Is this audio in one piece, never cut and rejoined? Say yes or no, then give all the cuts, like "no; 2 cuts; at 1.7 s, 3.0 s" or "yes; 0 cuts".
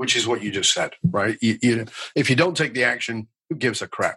yes; 0 cuts